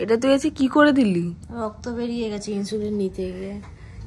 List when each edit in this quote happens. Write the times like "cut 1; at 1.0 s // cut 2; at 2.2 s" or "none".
none